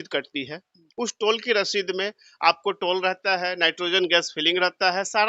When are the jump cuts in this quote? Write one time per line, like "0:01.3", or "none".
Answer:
none